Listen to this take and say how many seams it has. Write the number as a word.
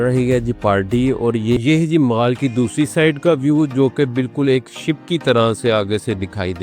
one